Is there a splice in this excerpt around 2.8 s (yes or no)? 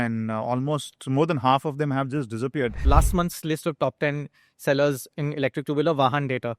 yes